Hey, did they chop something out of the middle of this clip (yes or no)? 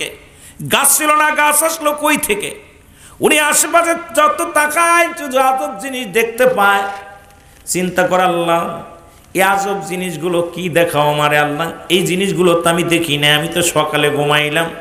no